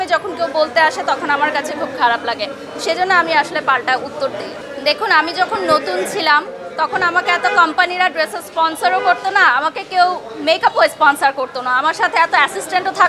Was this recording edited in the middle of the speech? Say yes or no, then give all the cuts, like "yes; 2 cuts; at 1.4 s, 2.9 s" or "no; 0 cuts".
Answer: no; 0 cuts